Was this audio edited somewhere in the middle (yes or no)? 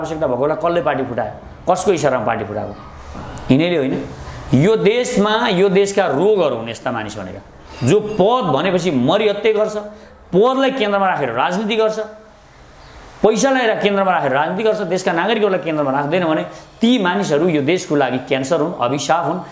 no